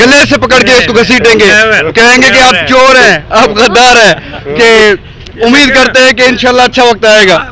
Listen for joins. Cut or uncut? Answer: uncut